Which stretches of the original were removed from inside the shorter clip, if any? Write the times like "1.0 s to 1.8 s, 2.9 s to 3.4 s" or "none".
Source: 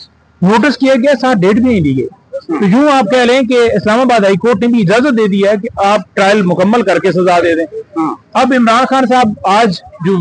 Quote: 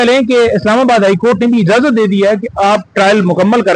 none